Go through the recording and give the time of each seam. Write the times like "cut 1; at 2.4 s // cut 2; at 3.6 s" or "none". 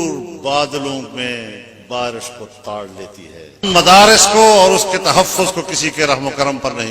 cut 1; at 3.7 s